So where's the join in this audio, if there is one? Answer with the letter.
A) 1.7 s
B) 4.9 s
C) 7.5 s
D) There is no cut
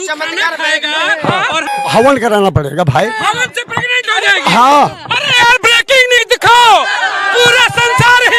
A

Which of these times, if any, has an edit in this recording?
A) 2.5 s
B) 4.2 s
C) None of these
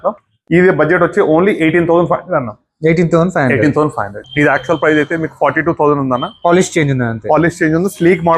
B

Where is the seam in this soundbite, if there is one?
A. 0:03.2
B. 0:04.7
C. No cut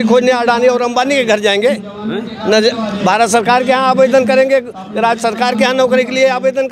C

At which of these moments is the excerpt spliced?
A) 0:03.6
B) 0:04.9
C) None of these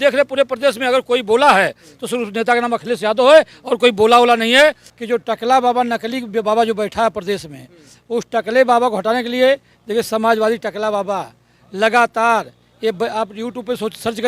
B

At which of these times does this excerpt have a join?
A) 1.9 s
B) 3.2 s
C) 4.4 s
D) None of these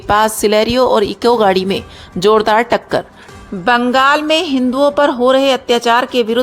B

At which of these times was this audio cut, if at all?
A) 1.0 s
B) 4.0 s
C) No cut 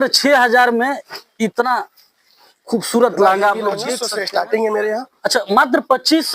B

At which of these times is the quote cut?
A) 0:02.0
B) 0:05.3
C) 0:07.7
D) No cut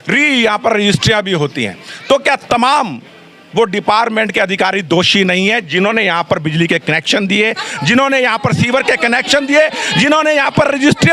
D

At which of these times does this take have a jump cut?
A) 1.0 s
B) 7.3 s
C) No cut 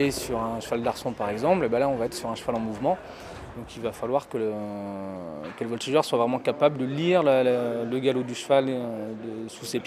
A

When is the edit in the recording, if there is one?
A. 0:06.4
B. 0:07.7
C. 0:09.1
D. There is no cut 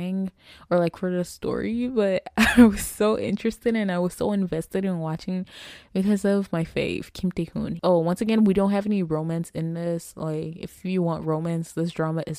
B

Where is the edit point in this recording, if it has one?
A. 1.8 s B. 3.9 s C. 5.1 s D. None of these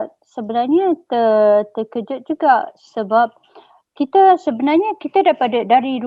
D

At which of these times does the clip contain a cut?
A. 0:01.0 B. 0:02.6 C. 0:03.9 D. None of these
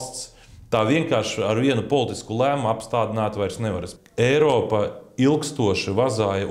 C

